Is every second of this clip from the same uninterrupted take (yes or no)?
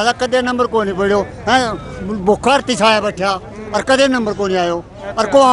yes